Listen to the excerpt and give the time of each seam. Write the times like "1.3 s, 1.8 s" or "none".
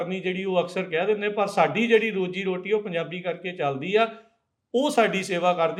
none